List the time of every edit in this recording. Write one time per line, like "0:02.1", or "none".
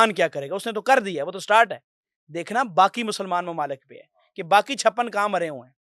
none